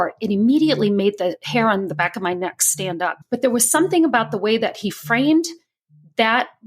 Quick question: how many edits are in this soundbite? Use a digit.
1